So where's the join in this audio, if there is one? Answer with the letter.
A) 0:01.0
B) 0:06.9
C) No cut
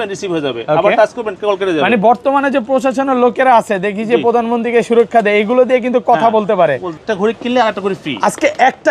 B